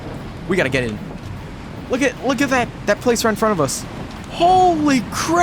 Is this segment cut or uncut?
cut